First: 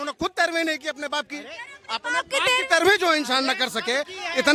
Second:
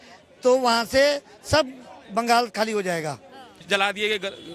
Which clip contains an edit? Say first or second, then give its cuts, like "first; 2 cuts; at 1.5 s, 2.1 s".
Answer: second; 1 cut; at 3.6 s